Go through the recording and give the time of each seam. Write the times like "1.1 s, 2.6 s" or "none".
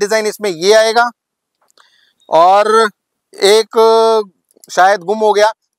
none